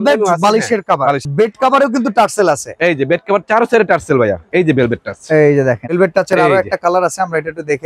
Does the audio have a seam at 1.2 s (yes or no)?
yes